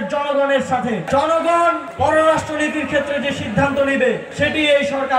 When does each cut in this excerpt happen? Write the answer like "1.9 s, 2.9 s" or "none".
1.1 s, 1.9 s, 4.3 s